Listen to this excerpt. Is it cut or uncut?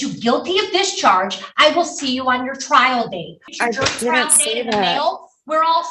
cut